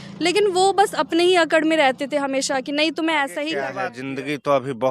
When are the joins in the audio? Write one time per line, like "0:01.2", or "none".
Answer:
0:03.7